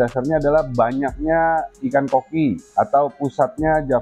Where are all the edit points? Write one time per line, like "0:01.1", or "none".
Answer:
none